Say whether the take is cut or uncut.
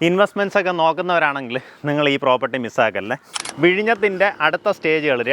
cut